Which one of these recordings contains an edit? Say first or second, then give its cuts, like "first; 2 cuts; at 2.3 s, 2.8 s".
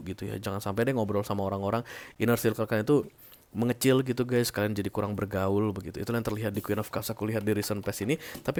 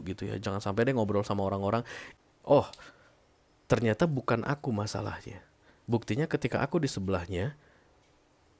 second; 1 cut; at 2.0 s